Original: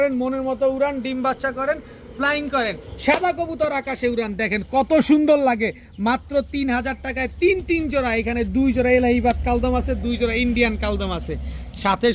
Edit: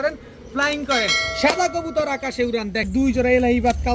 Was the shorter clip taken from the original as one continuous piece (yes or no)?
no